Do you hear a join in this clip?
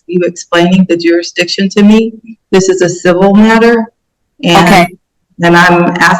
no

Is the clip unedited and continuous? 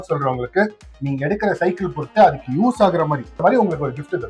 no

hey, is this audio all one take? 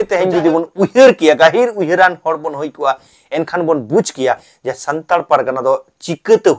yes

